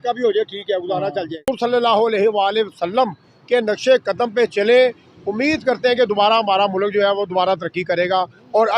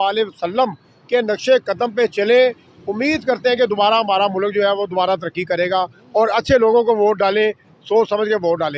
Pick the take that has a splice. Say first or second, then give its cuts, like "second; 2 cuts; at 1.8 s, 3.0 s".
first; 1 cut; at 1.5 s